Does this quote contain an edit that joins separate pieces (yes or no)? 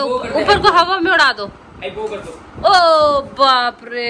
no